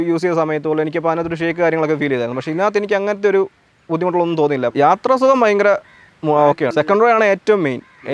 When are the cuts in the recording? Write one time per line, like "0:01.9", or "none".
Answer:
0:04.7